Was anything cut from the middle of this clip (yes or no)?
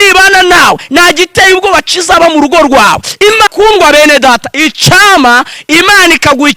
yes